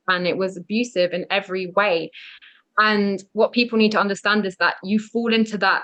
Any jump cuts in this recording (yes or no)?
no